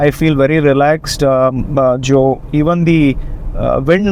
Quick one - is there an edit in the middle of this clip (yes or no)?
no